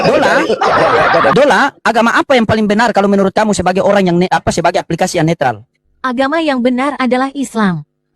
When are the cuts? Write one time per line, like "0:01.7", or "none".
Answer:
0:01.3